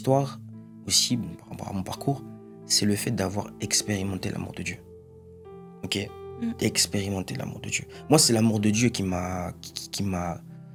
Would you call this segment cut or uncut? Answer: uncut